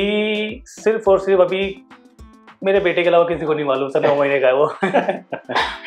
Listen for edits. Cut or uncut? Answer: uncut